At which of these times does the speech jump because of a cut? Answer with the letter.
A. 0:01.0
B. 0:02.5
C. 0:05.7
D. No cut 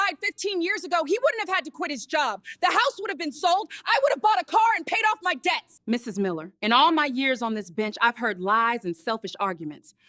C